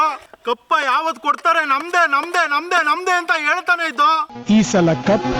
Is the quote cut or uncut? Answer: cut